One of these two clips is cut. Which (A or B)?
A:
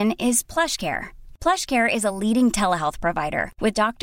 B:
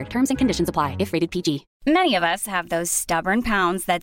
B